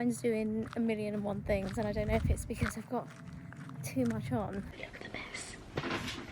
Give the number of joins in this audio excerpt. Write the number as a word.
one